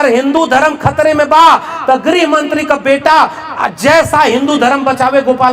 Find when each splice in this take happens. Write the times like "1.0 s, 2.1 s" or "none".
none